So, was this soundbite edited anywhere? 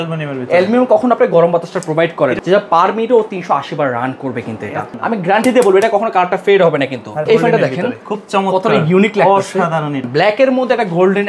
yes; 4 cuts; at 2.4 s, 4.9 s, 7.2 s, 10.0 s

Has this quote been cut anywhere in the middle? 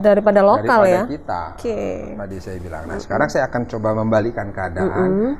no; 0 cuts

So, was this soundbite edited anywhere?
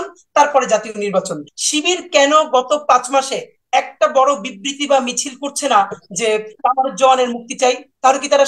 yes; 1 cut; at 1.5 s

